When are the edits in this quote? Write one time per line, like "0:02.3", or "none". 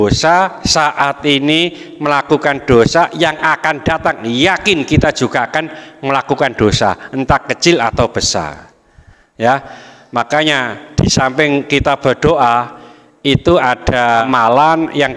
0:14.2